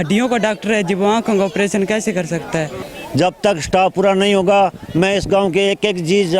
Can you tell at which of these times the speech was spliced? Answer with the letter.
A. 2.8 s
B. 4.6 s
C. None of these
A